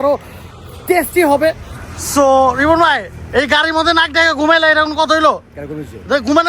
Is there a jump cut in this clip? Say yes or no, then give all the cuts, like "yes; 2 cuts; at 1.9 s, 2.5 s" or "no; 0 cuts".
yes; 1 cut; at 5.4 s